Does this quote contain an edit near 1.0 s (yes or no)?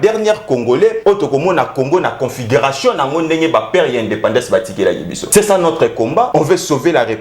yes